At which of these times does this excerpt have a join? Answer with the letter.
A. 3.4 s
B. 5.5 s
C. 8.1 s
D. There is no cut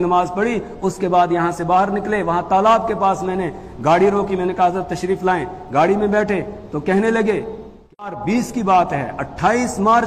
C